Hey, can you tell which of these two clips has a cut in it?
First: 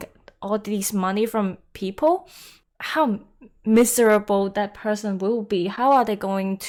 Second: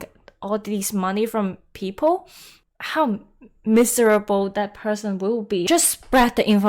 second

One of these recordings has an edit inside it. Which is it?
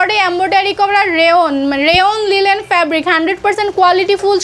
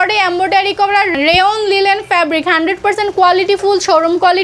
second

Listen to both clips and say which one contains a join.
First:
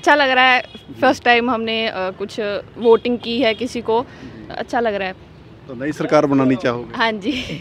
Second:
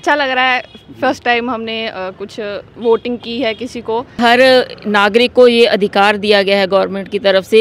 second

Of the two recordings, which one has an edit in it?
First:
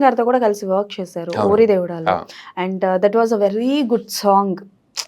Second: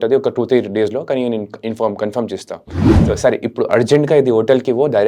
second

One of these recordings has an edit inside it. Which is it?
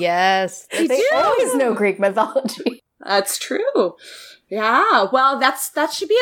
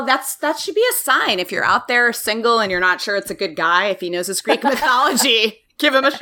first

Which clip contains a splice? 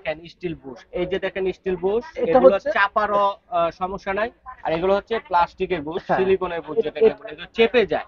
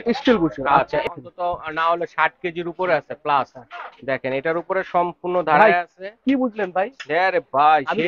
second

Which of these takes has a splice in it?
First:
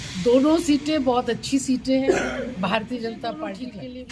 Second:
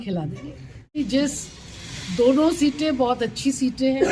second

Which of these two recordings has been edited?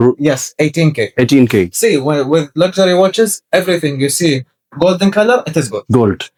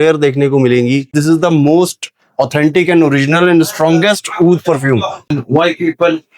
second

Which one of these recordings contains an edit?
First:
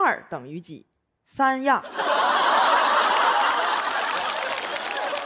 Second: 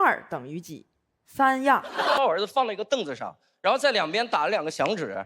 second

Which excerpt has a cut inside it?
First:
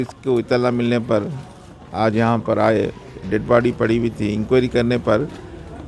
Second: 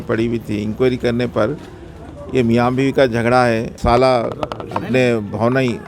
second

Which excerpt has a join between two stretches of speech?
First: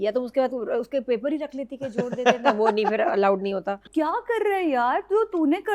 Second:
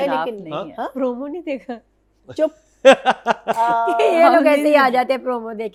first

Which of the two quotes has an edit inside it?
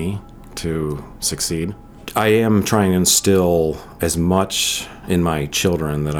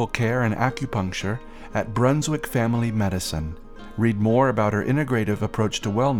first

